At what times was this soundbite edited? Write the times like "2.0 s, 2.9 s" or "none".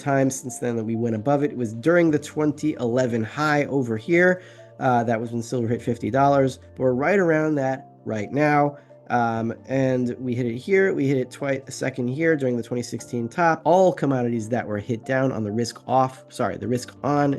13.6 s